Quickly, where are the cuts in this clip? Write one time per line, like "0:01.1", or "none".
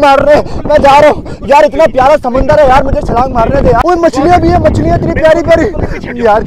0:01.3
0:03.8